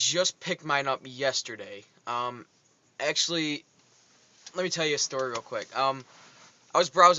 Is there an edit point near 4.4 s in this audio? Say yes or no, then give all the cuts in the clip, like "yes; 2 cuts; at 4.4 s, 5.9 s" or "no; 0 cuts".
yes; 1 cut; at 4.4 s